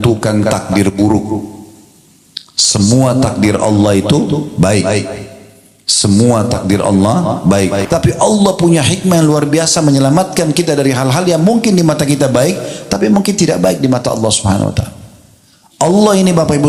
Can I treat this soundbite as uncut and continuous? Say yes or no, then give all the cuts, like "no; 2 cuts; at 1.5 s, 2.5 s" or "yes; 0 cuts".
no; 1 cut; at 7.8 s